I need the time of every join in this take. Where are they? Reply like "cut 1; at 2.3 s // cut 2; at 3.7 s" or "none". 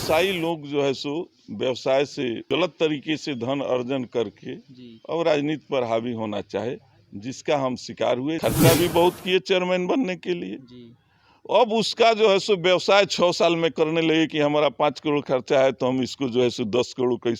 cut 1; at 2.5 s // cut 2; at 8.4 s